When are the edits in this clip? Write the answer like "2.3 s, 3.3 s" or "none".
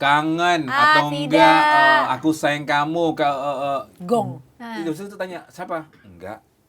4.7 s